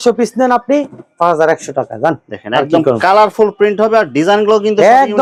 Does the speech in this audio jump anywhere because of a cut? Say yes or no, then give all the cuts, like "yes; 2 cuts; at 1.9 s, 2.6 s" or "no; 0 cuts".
no; 0 cuts